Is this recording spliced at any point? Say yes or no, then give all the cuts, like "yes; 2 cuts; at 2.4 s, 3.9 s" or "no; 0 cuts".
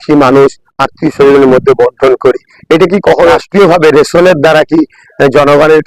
yes; 1 cut; at 3.4 s